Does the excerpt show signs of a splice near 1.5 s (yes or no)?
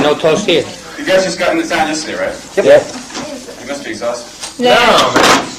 yes